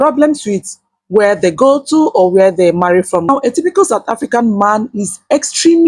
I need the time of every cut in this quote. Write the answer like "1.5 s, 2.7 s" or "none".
3.3 s